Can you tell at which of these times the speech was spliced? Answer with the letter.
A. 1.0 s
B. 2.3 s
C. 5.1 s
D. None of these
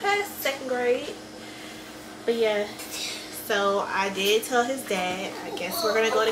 D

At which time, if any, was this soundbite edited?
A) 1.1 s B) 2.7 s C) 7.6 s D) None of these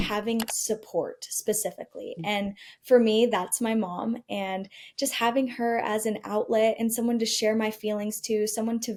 D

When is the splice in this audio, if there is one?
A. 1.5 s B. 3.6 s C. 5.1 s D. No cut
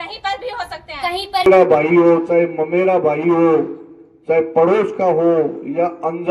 A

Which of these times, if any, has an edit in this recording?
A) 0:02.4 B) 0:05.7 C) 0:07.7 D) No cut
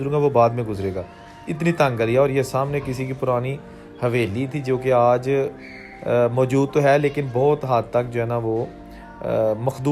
D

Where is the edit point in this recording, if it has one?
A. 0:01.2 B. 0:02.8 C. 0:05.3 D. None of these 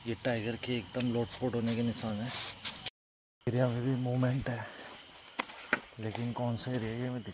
D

